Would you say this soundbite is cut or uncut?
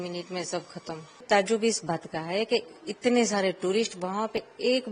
cut